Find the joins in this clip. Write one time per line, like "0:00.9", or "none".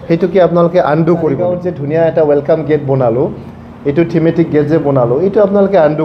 0:01.4